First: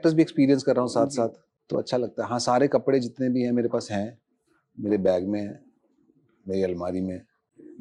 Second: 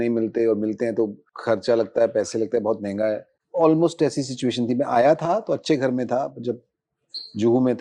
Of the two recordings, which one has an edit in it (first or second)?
second